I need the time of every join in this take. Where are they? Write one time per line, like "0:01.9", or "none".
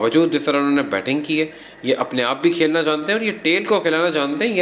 none